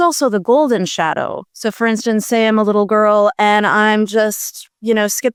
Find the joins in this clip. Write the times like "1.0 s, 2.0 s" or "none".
none